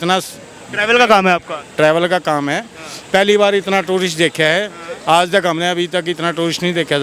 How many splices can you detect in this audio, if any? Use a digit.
0